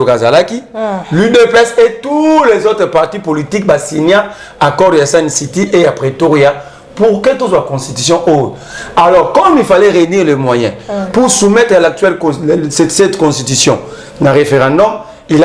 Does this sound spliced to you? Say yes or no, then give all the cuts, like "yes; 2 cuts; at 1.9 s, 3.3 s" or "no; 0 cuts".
no; 0 cuts